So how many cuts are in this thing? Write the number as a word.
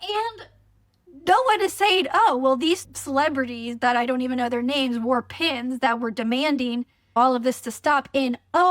two